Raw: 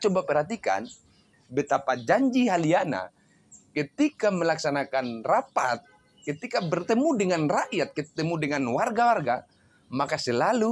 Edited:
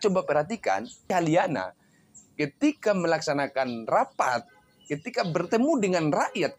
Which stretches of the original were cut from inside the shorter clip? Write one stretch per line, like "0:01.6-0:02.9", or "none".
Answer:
0:01.1-0:02.5